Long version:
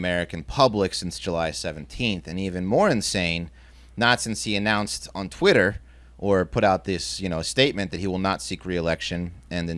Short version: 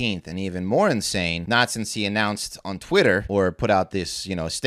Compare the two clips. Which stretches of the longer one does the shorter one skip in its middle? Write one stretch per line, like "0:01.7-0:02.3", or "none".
0:03.4-0:03.9
0:05.7-0:06.2